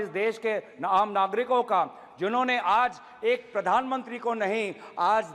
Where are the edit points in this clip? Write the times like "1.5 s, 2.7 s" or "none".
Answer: none